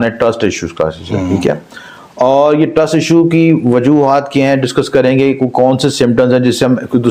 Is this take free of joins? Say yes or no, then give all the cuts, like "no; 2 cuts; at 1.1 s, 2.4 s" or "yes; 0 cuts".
yes; 0 cuts